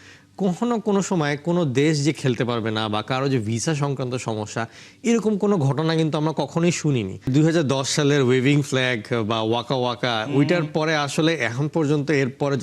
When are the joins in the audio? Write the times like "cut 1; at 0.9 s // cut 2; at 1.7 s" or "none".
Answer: cut 1; at 7.3 s